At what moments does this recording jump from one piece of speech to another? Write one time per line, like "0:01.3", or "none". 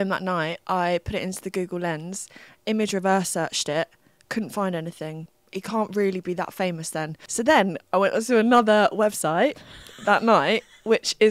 0:05.3
0:07.2